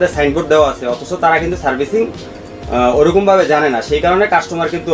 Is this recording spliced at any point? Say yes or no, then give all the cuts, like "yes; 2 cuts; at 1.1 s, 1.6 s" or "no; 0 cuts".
no; 0 cuts